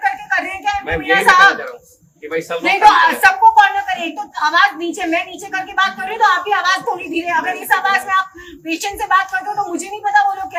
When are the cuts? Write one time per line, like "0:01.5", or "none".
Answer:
none